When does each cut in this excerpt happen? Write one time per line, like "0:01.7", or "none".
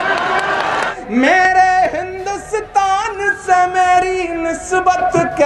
0:00.9

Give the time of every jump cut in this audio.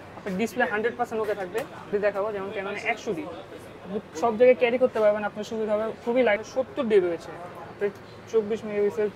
0:01.9
0:06.4

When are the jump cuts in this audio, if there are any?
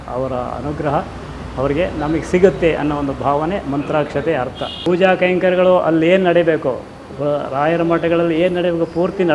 0:04.7

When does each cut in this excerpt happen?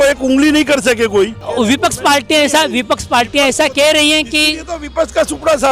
0:01.5

